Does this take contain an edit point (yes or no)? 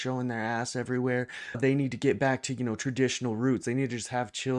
no